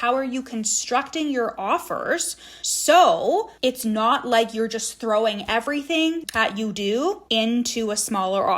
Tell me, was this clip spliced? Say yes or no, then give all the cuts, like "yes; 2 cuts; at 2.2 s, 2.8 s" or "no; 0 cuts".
yes; 1 cut; at 6.2 s